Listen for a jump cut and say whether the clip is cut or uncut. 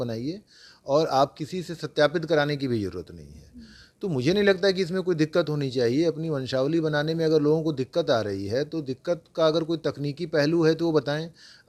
uncut